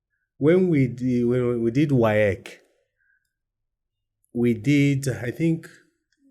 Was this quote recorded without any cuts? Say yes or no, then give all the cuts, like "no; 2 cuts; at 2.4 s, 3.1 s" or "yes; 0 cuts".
yes; 0 cuts